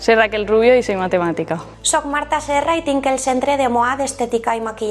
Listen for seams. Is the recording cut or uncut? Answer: cut